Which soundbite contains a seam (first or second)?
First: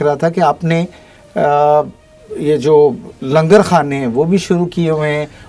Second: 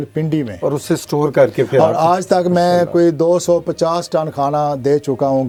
first